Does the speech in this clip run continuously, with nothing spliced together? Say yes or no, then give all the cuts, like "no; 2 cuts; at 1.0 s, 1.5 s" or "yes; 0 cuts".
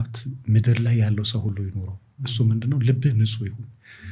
yes; 0 cuts